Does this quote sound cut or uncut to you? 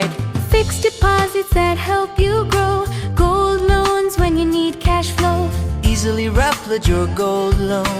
uncut